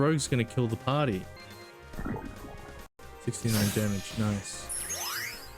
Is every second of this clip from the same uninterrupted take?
no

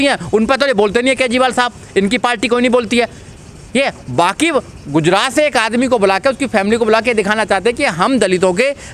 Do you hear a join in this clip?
no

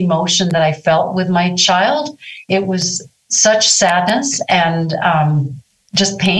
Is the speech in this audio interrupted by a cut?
yes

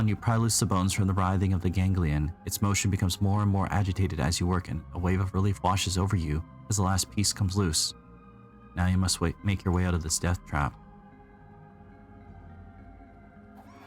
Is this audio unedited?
no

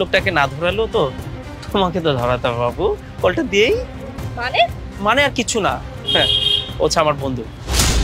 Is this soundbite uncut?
yes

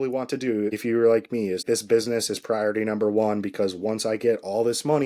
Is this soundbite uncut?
no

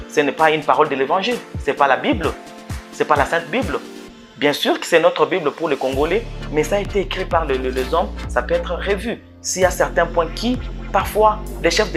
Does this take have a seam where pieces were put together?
no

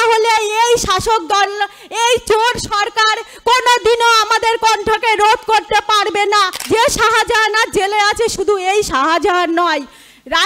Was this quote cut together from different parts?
yes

